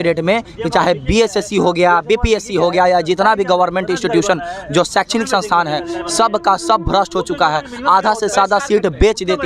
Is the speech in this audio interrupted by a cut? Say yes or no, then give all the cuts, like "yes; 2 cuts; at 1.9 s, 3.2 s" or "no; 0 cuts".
no; 0 cuts